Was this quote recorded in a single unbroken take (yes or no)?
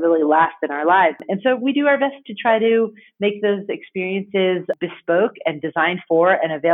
no